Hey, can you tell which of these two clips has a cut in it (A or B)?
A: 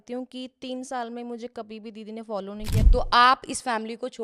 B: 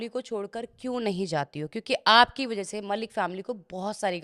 A